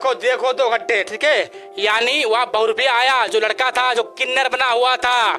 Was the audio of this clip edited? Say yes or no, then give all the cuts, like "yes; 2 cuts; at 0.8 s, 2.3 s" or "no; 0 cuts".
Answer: no; 0 cuts